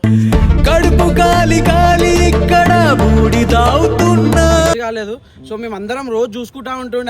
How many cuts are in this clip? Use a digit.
1